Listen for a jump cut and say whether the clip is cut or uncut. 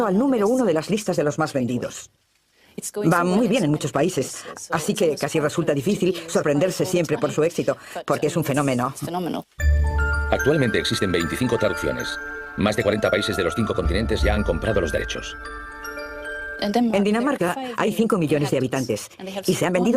cut